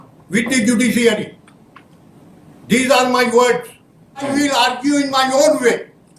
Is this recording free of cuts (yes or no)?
no